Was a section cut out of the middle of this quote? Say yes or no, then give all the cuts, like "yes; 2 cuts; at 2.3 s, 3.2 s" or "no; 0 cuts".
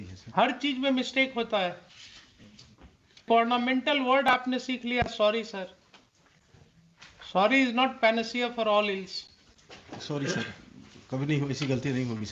yes; 1 cut; at 3.3 s